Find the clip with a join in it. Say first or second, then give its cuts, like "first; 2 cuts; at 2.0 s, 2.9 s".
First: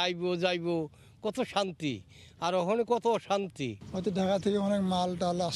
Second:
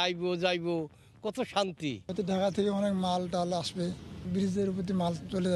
second; 2 cuts; at 2.0 s, 4.2 s